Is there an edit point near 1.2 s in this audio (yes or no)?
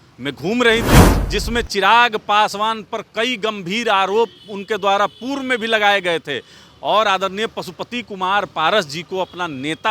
yes